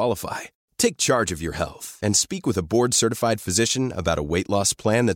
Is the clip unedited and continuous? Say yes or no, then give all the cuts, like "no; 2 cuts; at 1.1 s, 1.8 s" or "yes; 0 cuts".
yes; 0 cuts